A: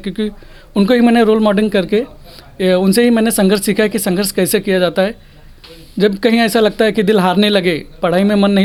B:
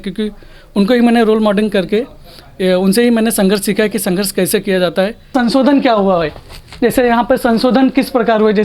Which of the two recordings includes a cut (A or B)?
B